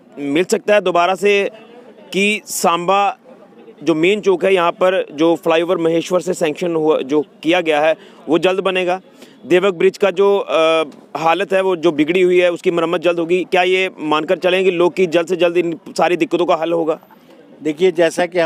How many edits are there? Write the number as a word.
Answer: zero